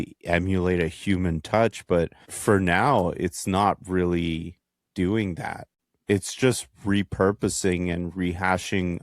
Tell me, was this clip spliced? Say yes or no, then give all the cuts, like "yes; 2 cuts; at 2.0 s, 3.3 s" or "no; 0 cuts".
yes; 2 cuts; at 2.2 s, 5.8 s